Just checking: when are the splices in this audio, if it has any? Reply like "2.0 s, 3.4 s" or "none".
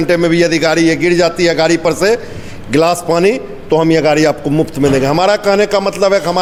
none